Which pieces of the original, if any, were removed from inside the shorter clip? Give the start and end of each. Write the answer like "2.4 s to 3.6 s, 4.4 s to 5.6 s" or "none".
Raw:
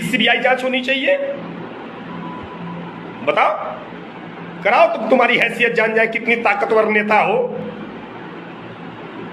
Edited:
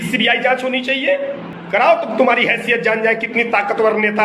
1.5 s to 4.4 s